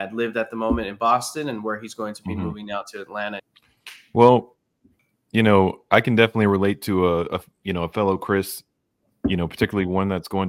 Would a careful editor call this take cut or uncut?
cut